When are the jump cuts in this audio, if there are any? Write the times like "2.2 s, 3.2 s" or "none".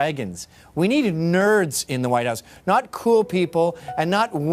3.5 s